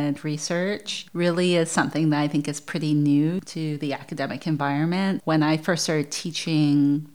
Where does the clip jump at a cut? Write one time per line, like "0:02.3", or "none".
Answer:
0:01.0
0:05.2